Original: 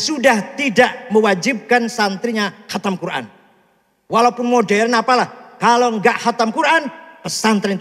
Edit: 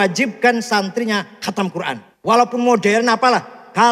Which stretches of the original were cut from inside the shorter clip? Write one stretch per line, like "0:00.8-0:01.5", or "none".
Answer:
0:03.3-0:03.9